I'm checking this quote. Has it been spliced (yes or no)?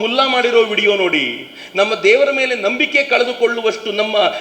no